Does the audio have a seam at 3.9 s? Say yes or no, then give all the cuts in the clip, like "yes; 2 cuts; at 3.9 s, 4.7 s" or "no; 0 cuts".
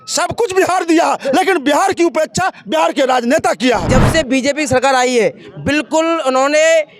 yes; 1 cut; at 3.9 s